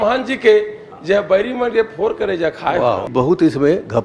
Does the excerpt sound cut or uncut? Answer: cut